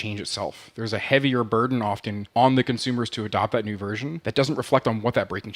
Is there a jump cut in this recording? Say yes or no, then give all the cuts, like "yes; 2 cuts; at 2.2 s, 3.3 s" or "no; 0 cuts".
yes; 2 cuts; at 2.1 s, 4.2 s